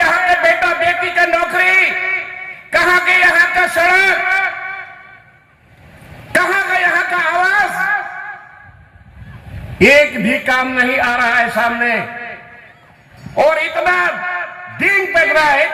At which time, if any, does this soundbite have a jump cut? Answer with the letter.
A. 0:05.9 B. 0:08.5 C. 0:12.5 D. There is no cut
D